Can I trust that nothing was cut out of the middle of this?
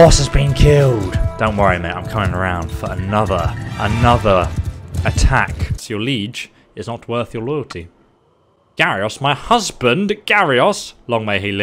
no; 1 cut; at 5.8 s

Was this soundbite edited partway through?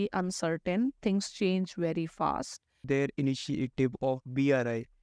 yes; 1 cut; at 2.8 s

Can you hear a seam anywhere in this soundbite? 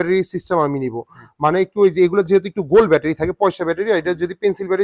no; 0 cuts

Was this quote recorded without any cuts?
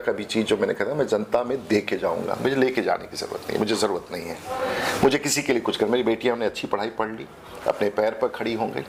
yes; 0 cuts

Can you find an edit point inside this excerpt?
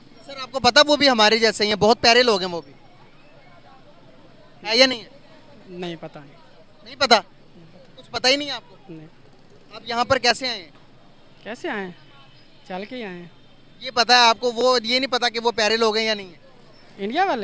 no; 0 cuts

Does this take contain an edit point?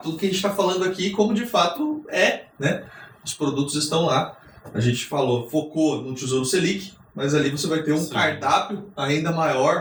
no; 0 cuts

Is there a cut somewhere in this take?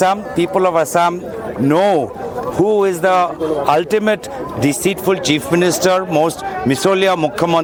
no; 0 cuts

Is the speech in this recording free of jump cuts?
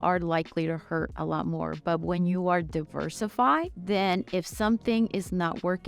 no; 1 cut; at 3.7 s

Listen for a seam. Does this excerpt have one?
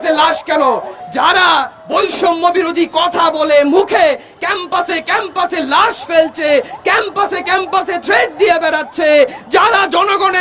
yes; 1 cut; at 1.0 s

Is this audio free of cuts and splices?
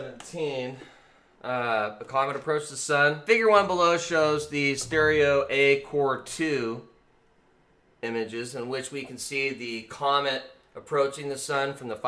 no; 1 cut; at 3.9 s

